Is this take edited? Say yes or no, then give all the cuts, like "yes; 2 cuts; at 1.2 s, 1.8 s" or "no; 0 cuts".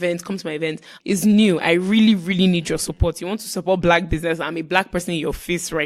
yes; 1 cut; at 0.9 s